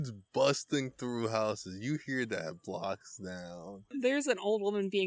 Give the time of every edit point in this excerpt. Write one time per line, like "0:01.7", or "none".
0:04.0